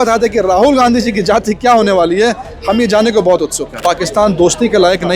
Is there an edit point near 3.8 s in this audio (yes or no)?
yes